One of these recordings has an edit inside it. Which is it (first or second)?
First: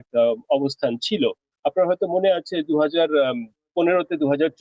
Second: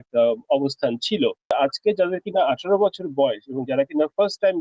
second